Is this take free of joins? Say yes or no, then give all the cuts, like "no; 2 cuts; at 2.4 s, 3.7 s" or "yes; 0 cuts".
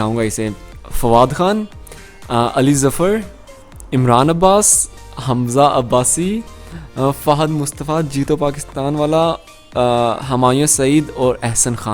yes; 0 cuts